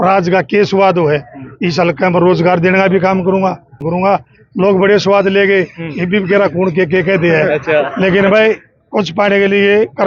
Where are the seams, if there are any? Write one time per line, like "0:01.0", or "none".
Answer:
0:03.8